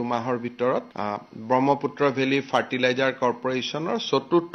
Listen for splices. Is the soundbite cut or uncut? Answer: uncut